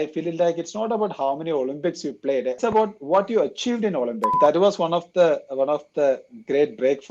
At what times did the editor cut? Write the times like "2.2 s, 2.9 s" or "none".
2.6 s, 4.3 s